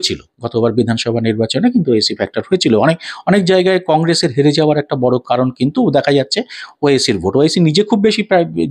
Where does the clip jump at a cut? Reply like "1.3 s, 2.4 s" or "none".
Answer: none